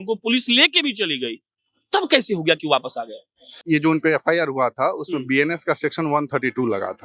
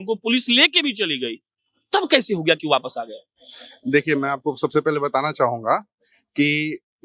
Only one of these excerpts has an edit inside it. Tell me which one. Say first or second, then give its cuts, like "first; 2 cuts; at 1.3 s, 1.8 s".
first; 1 cut; at 3.5 s